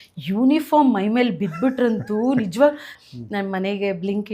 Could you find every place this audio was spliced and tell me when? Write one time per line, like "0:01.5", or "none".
0:02.9